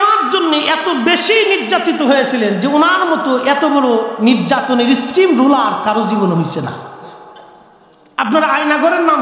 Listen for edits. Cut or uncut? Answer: uncut